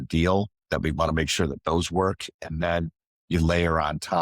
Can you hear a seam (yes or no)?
no